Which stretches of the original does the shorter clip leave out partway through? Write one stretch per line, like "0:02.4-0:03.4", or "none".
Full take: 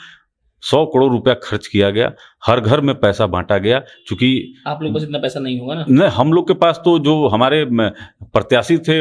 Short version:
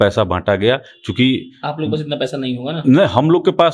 none